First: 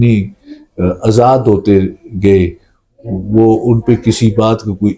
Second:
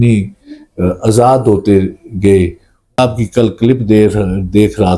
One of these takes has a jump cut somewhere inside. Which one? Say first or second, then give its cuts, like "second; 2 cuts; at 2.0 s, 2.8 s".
second; 1 cut; at 3.0 s